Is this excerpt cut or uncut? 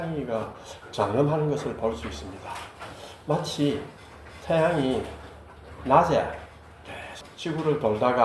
cut